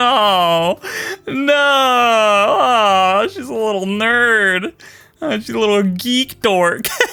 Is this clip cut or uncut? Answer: uncut